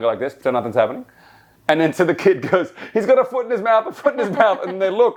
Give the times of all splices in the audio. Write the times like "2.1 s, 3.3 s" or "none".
none